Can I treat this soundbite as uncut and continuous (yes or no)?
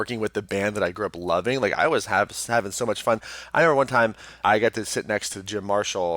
no